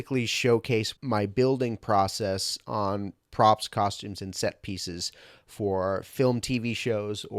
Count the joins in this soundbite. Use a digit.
1